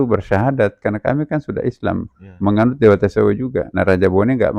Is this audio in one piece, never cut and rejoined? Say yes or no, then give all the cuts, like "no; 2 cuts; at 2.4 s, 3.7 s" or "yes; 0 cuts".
no; 1 cut; at 3.7 s